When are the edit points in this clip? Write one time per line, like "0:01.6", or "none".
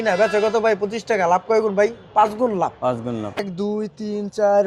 0:03.4